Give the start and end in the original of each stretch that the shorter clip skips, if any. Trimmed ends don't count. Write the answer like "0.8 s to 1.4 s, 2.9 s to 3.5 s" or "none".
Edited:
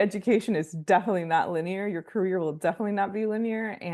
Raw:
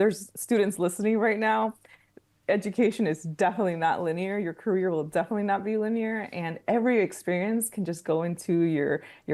none